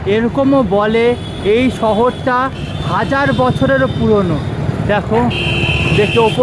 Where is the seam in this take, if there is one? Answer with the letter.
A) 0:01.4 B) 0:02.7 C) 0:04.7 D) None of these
D